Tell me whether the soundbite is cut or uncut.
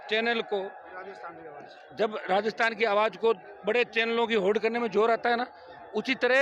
uncut